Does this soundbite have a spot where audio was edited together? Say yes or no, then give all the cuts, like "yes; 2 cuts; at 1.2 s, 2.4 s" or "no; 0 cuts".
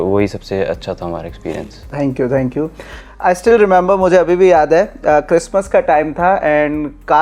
no; 0 cuts